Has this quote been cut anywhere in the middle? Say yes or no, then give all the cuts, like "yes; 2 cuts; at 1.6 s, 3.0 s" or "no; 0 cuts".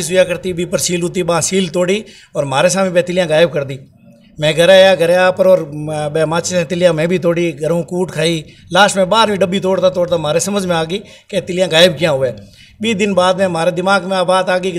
no; 0 cuts